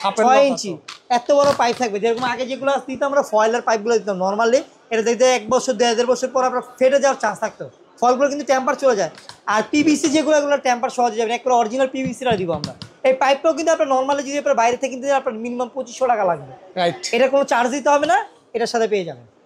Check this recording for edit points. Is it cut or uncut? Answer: uncut